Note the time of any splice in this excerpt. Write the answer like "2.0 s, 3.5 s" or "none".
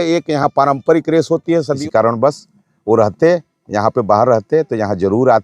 1.7 s